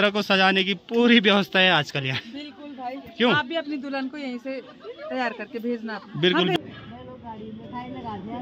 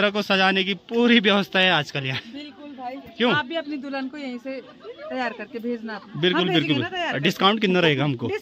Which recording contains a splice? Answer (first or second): first